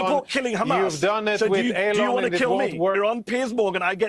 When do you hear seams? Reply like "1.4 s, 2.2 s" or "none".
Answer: 3.0 s